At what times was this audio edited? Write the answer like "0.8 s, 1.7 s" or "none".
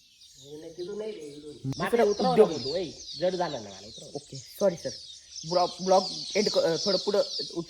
1.7 s